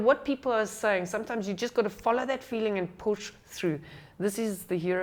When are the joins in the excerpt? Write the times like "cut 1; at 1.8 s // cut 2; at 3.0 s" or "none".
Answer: none